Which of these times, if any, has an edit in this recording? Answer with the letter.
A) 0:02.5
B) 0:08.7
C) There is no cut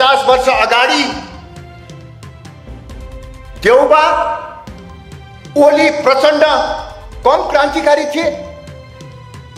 B